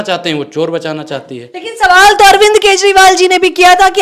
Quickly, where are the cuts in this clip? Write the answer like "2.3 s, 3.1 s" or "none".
none

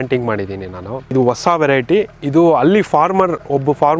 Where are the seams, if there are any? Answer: 1.0 s

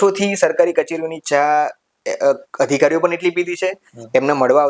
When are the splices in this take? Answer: none

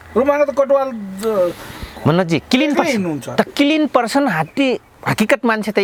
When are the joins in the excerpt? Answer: none

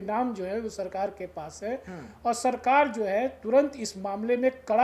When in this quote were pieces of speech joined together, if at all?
none

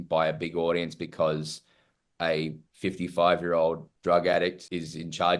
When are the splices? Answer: 3.9 s

